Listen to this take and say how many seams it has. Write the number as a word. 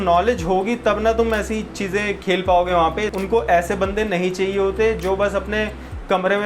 one